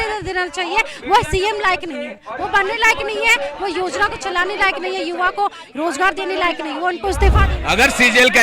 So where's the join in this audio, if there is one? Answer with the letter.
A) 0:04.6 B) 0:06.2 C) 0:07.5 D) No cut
C